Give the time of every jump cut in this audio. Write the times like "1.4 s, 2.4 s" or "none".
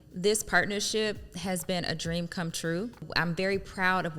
3.1 s